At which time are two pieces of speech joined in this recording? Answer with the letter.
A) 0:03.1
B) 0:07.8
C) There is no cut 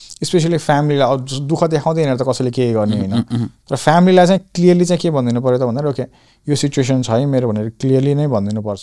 C